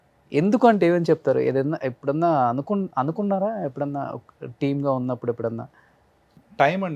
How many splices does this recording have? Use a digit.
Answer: 0